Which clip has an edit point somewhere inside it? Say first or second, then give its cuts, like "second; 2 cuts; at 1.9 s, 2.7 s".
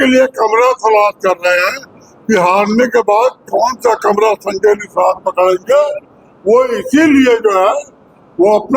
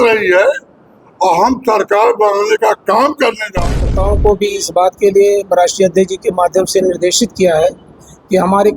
second; 1 cut; at 3.8 s